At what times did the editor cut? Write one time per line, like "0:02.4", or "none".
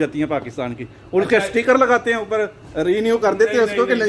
none